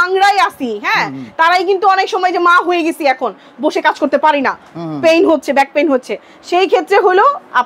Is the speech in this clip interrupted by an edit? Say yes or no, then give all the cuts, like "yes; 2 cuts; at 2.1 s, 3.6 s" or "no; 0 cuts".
no; 0 cuts